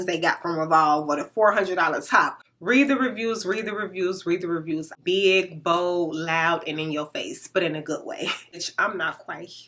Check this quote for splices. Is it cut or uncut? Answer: cut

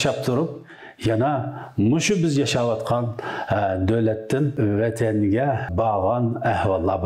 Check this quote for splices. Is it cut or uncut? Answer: cut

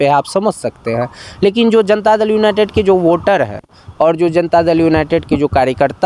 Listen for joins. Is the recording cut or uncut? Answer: uncut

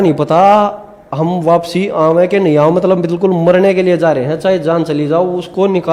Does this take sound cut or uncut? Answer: uncut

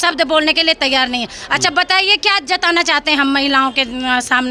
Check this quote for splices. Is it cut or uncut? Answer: uncut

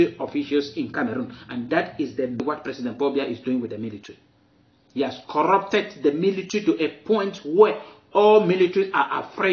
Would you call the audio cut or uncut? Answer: cut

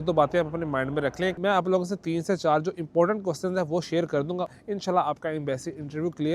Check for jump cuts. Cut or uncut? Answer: cut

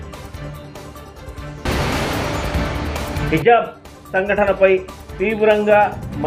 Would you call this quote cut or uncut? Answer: uncut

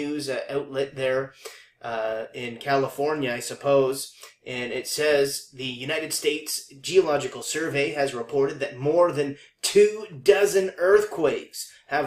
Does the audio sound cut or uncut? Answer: uncut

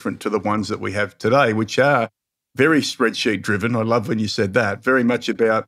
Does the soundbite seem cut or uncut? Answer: uncut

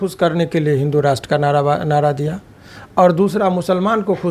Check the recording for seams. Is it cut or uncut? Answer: uncut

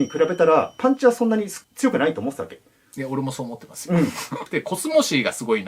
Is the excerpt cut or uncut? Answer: cut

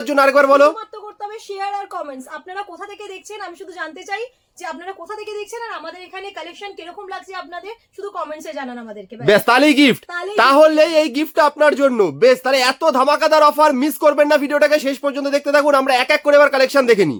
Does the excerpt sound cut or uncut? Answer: uncut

